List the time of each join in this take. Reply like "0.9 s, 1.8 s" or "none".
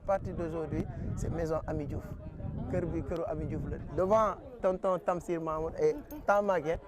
3.8 s